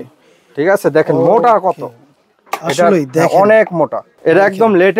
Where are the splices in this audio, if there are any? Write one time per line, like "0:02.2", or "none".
0:04.1